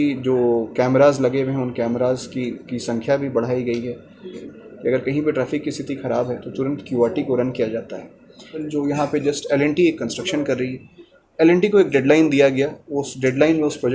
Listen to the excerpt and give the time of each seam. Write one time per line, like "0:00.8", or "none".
0:04.4
0:08.6